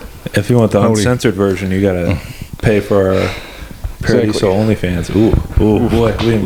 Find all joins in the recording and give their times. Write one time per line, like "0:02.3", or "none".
none